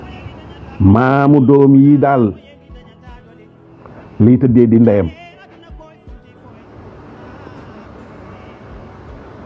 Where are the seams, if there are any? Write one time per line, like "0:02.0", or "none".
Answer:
0:05.4
0:06.7